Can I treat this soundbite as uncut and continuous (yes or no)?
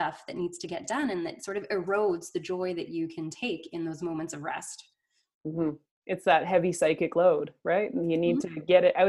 yes